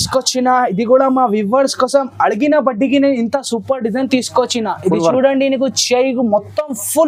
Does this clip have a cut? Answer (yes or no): no